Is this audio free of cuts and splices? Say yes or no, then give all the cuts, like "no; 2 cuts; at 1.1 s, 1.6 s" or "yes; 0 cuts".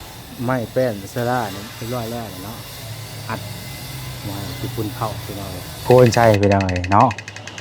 no; 1 cut; at 5.8 s